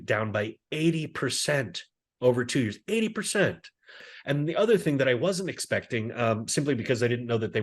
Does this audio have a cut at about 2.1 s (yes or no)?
no